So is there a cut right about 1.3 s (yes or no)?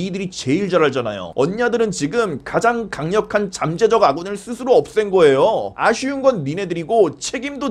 yes